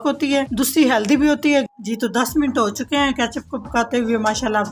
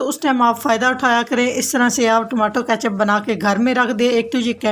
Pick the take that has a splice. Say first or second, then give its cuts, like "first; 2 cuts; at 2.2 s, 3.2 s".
first; 1 cut; at 1.7 s